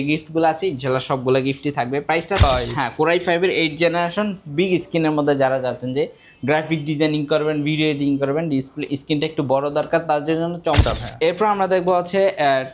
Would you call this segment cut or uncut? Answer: cut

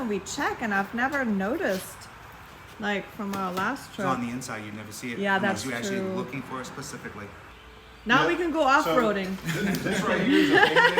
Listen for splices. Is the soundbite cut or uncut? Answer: cut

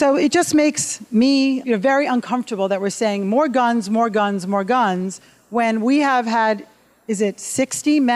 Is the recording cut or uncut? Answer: cut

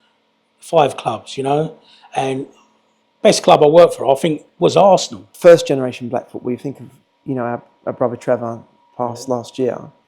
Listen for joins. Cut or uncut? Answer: cut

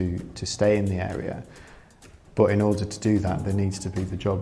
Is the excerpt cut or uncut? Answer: uncut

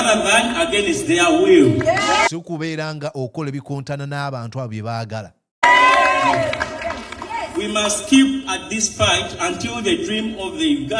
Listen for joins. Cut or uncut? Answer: uncut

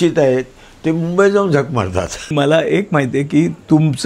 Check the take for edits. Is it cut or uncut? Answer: cut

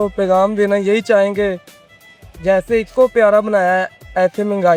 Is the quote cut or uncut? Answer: uncut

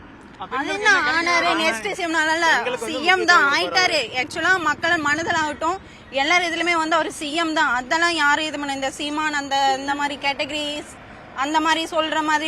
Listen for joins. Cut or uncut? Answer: uncut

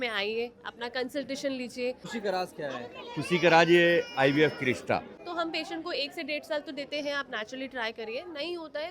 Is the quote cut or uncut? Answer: cut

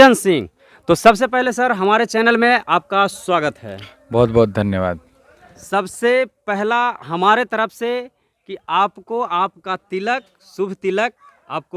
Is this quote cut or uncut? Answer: uncut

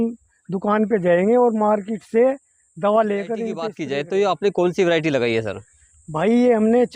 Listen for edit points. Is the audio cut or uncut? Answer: cut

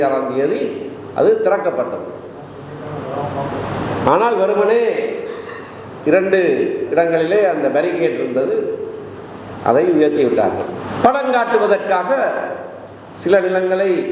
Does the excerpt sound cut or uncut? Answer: cut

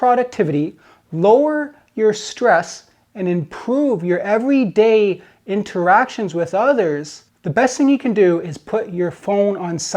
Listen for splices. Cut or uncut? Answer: uncut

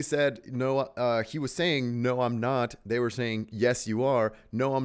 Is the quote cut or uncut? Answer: uncut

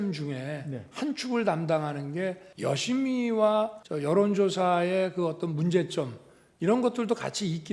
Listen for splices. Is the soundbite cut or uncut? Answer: cut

